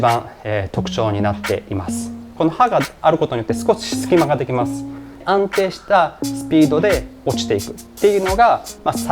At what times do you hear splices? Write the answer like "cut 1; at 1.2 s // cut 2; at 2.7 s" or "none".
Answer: cut 1; at 2.3 s // cut 2; at 5.2 s

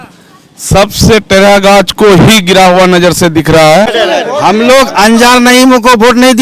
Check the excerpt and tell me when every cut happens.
cut 1; at 3.9 s

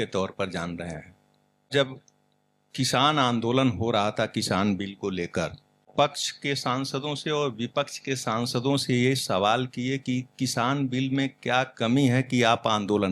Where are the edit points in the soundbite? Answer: cut 1; at 1.7 s // cut 2; at 5.8 s

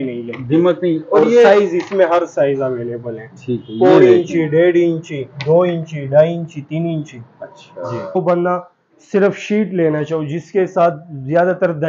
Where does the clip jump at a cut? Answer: cut 1; at 8.2 s

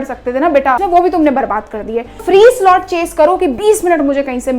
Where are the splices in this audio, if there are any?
cut 1; at 0.8 s // cut 2; at 2.2 s

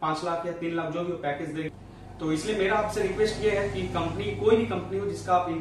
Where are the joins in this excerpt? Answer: none

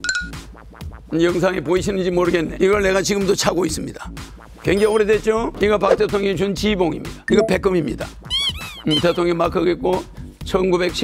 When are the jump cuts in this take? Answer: cut 1; at 2.5 s // cut 2; at 5.5 s // cut 3; at 7.1 s

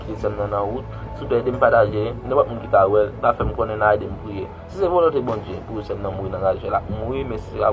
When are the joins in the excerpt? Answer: none

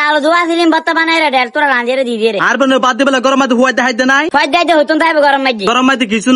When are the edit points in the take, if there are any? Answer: none

